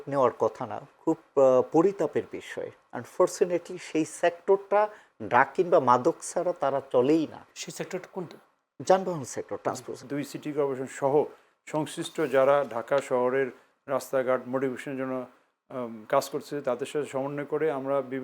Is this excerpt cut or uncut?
cut